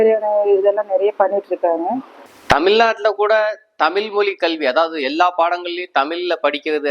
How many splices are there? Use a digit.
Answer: 1